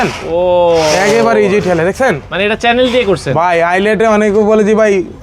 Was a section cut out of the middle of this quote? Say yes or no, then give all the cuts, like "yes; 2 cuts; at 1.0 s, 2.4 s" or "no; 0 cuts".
no; 0 cuts